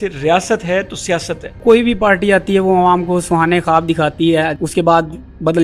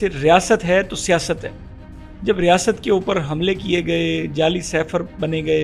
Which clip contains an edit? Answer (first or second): first